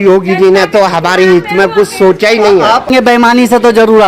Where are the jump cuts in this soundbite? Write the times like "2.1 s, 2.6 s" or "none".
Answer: 2.9 s